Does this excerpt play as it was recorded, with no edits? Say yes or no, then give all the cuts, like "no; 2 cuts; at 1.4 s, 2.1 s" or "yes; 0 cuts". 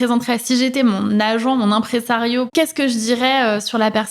no; 1 cut; at 2.5 s